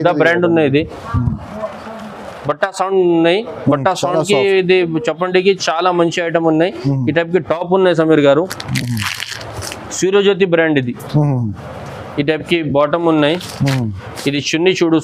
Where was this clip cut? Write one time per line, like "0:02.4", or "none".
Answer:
none